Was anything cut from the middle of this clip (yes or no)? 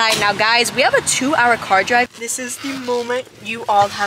yes